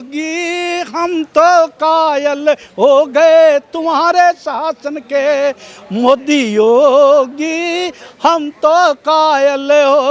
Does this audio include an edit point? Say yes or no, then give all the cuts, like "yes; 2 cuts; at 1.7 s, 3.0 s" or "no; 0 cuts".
no; 0 cuts